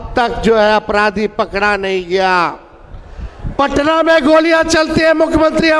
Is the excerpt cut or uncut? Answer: uncut